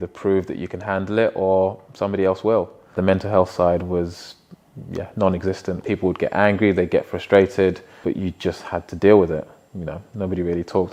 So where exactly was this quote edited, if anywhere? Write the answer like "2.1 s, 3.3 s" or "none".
3.0 s, 5.8 s, 7.9 s